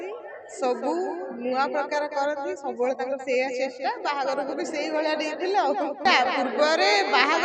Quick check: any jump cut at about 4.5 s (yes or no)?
no